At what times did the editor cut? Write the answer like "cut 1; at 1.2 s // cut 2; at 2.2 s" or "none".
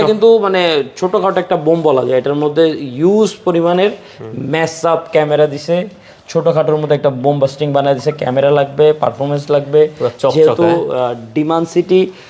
none